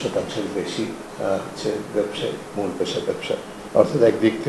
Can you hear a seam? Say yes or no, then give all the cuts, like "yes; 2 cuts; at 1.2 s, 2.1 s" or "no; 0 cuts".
yes; 1 cut; at 3.6 s